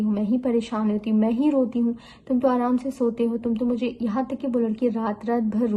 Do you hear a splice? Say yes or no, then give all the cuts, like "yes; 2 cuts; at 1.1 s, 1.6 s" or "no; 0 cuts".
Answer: no; 0 cuts